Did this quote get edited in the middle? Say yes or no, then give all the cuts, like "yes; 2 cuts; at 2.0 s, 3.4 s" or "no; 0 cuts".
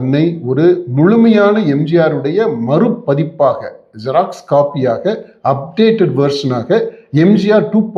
no; 0 cuts